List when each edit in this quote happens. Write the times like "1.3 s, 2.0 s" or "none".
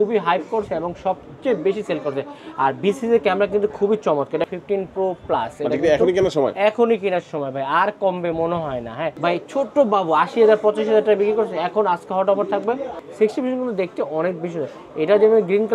4.5 s, 9.1 s, 13.0 s